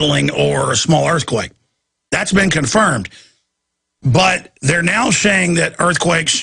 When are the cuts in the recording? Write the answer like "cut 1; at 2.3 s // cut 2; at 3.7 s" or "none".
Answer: cut 1; at 2.7 s